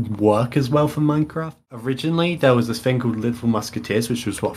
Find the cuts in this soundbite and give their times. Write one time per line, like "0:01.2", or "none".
0:01.5